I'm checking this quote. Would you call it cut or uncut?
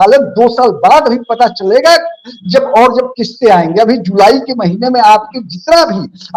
uncut